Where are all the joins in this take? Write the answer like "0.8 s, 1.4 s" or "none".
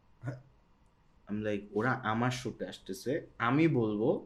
none